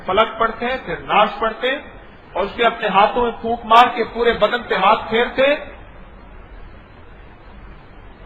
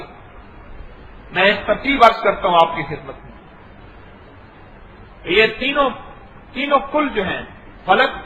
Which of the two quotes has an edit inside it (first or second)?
second